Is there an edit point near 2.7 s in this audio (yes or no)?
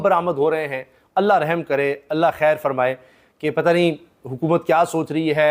no